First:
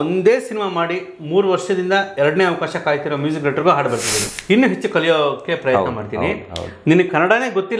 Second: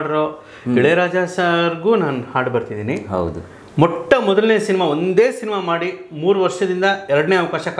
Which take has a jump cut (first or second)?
first